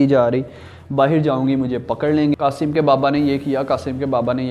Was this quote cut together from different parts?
yes; 1 cut; at 2.4 s

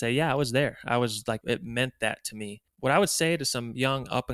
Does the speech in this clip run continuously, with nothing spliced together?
no; 2 cuts; at 1.4 s, 2.7 s

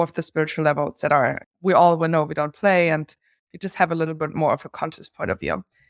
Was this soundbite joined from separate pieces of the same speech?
no; 0 cuts

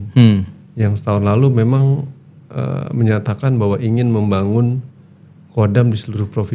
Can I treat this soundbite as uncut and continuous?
yes; 0 cuts

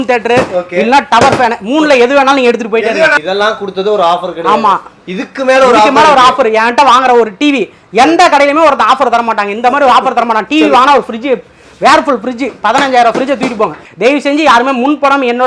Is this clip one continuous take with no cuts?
no; 2 cuts; at 3.2 s, 13.8 s

